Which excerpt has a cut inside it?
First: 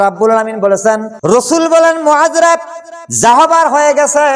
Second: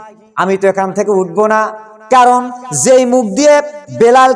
first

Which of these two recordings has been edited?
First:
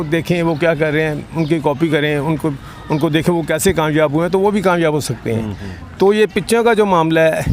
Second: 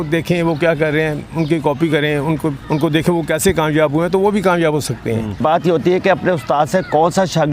second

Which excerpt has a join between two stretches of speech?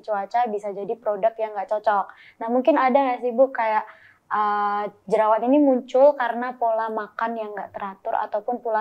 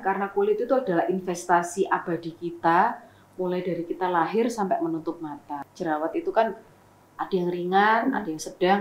second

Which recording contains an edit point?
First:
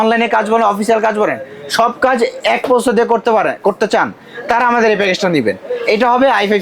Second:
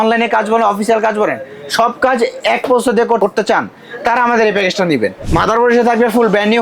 second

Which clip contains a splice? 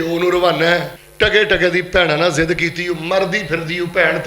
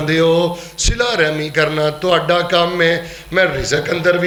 first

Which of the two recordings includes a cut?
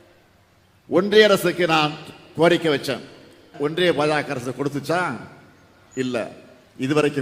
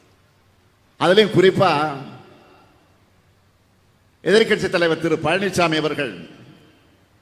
first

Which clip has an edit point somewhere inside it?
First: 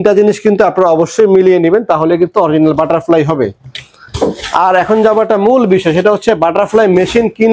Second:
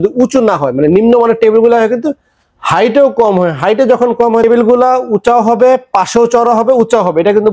second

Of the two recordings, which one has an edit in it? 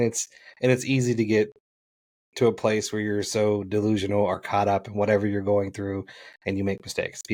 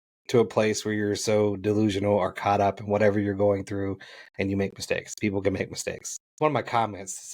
second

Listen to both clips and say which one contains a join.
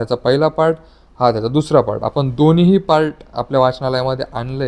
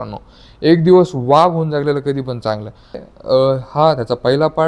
second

